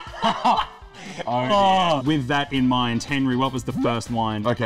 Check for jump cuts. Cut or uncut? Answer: cut